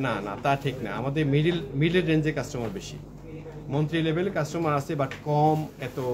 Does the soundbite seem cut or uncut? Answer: uncut